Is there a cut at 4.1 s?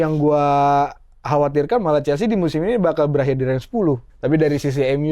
yes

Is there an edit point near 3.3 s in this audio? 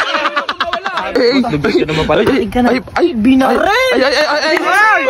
no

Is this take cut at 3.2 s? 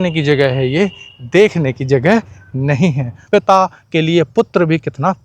yes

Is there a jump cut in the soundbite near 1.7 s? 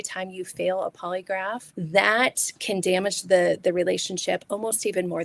yes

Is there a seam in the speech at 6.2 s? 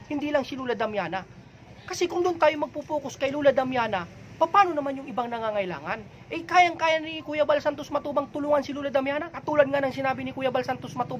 no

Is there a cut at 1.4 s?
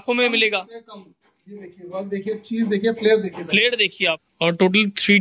no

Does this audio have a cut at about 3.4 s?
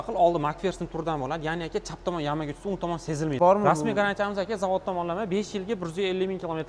yes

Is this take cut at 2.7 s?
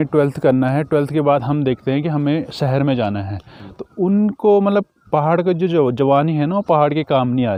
no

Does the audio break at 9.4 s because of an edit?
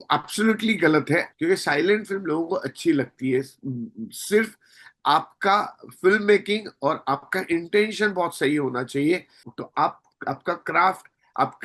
yes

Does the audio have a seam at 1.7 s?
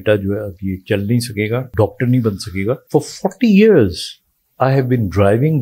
yes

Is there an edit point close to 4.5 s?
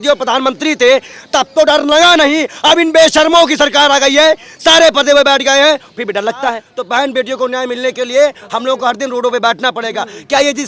no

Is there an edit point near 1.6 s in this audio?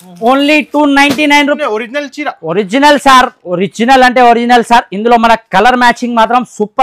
yes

